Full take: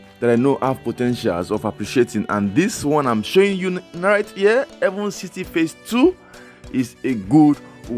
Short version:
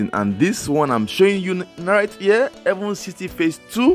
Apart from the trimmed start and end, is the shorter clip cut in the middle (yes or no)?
no